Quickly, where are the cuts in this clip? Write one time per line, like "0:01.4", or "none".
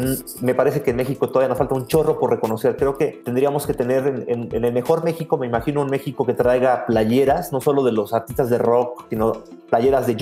0:03.2
0:09.0